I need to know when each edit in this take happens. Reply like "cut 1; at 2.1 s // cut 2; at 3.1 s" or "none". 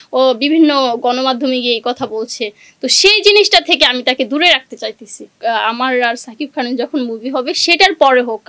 cut 1; at 5.4 s